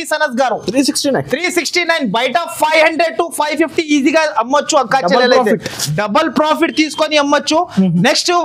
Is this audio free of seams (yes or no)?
yes